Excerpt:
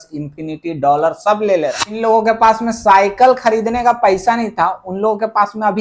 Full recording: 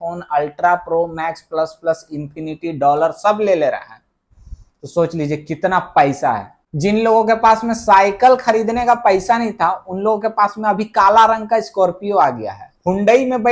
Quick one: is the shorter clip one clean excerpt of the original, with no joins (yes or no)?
no